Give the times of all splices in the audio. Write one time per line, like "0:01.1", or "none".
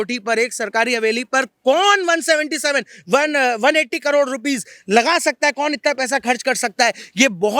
none